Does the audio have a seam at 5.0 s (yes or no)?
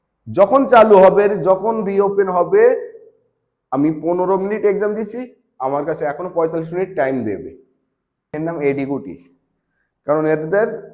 no